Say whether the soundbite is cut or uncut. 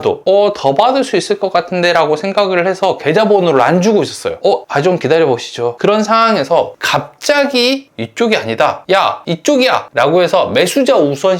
cut